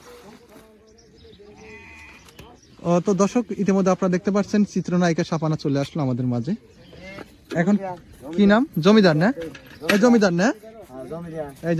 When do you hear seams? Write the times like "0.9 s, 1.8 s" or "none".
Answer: 6.7 s

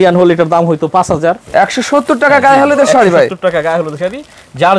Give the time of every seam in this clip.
1.4 s

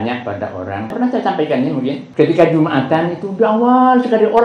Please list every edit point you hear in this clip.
0.9 s, 2.0 s

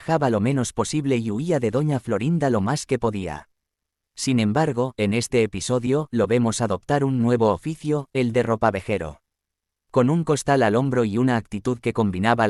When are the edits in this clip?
none

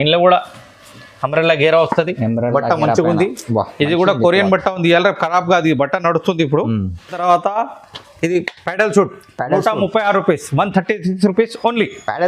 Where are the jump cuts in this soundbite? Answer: 7.2 s

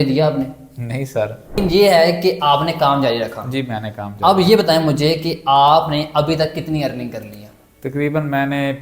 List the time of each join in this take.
1.5 s

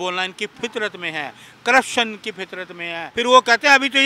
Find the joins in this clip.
3.0 s

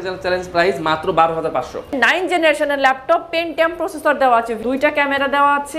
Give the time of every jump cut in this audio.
2.0 s, 4.6 s

